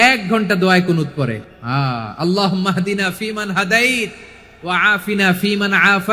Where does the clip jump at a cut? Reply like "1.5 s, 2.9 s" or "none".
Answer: 1.4 s